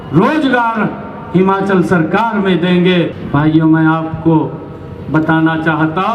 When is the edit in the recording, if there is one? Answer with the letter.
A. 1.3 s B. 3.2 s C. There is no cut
B